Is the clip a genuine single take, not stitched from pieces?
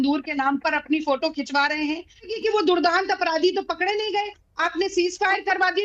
no; 1 cut; at 2.3 s

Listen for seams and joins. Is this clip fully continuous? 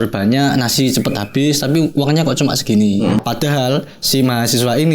no; 1 cut; at 3.2 s

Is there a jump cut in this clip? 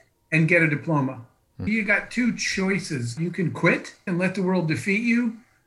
yes; 3 cuts; at 1.6 s, 3.1 s, 4.1 s

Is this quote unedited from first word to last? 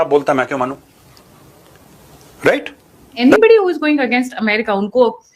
no; 1 cut; at 3.2 s

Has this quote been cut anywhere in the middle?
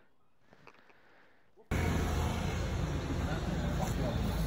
yes; 1 cut; at 1.7 s

